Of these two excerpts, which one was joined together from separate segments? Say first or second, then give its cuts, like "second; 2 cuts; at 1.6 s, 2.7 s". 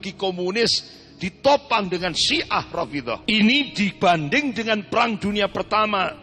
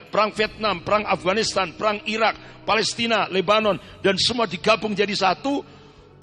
first; 1 cut; at 3.2 s